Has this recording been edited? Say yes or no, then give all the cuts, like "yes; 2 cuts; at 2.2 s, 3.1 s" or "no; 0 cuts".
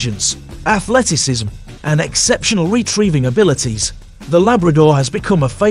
no; 0 cuts